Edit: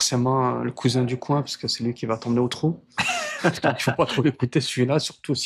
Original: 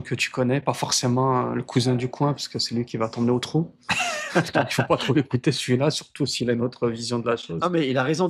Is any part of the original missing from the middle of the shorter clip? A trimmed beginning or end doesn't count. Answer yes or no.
no